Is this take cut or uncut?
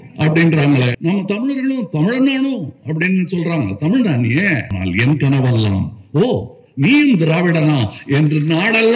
cut